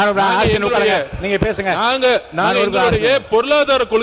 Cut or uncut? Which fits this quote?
uncut